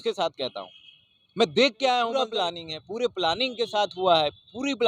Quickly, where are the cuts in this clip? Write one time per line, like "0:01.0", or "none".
0:02.1